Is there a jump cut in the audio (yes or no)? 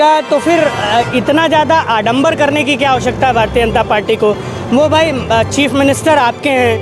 no